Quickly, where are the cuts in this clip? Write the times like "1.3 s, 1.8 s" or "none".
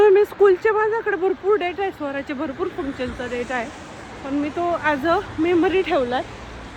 none